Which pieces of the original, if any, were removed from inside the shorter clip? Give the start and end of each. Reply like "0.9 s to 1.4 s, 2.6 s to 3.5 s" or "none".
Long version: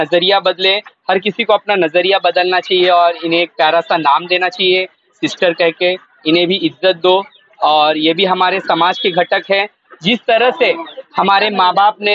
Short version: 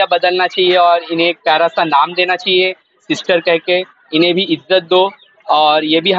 none